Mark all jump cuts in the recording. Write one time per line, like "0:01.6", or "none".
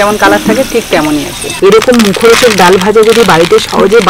0:01.4